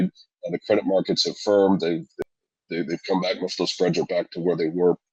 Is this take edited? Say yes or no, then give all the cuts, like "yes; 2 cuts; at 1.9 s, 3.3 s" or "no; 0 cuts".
yes; 1 cut; at 2.1 s